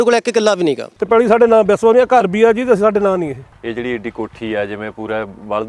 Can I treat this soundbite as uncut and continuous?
no; 2 cuts; at 0.9 s, 3.5 s

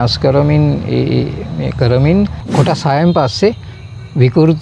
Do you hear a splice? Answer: yes; 1 cut; at 2.4 s

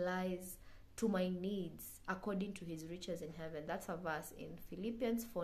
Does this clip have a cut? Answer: no; 0 cuts

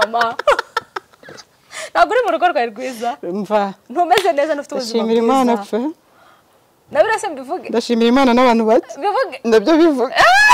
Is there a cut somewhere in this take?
no; 0 cuts

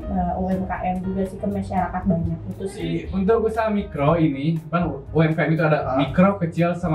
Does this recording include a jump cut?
yes; 1 cut; at 3.0 s

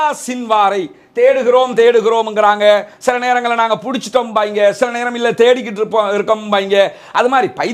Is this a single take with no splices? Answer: yes; 0 cuts

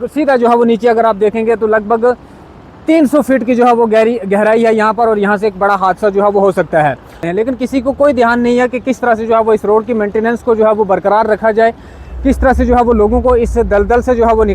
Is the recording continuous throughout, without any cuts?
no; 1 cut; at 7.2 s

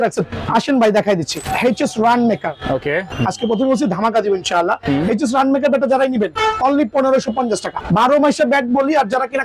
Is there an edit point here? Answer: yes; 3 cuts; at 1.4 s, 3.1 s, 7.8 s

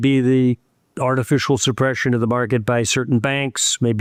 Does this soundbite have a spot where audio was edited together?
no; 0 cuts

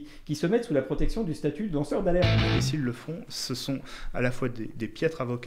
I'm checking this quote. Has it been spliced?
yes; 1 cut; at 2.5 s

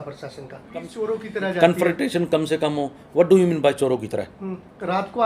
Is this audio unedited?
no; 1 cut; at 1.0 s

